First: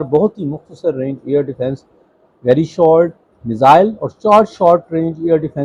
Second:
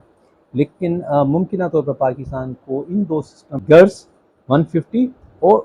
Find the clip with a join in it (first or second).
second